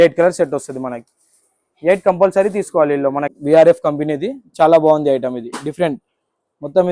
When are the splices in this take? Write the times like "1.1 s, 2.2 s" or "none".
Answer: 3.3 s

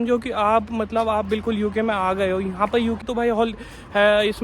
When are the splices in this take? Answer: 3.0 s

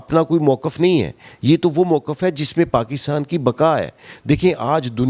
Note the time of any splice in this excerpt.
none

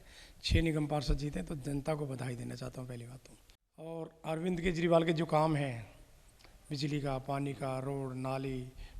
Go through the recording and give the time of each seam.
3.9 s

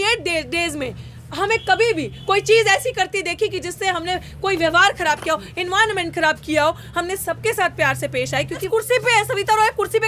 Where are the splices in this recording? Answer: 8.6 s

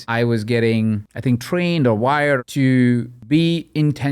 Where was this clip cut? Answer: 1.1 s, 2.4 s, 3.1 s

